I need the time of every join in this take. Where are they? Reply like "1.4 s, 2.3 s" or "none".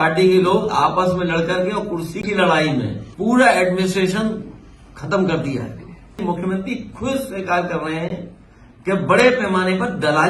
3.0 s, 6.2 s